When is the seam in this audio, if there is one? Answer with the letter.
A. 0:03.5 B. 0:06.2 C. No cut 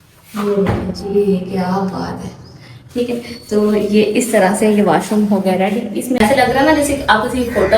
B